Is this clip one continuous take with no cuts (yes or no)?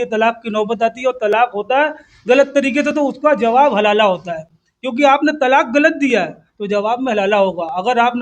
yes